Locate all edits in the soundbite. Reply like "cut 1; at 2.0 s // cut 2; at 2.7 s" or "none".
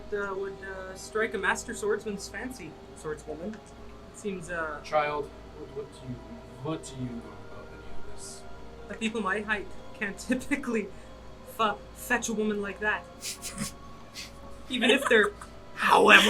cut 1; at 3.8 s